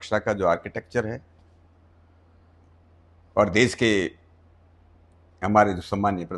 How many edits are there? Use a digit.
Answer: 0